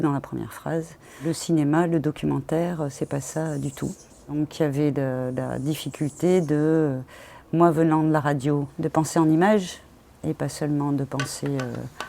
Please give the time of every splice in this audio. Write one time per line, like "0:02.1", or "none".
0:01.2
0:04.3
0:08.7